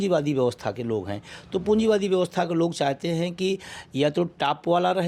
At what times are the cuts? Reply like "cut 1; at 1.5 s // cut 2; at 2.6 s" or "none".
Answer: none